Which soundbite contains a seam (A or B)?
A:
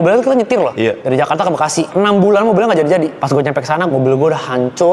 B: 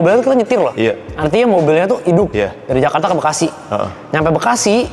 A